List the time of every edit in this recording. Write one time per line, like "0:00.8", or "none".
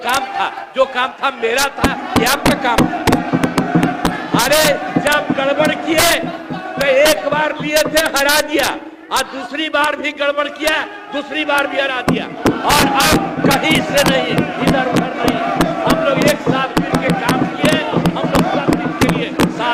none